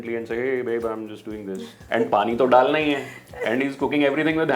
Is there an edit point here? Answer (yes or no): yes